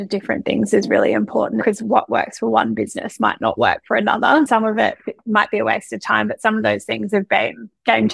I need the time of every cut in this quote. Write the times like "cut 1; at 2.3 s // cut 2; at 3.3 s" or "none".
cut 1; at 1.6 s // cut 2; at 4.5 s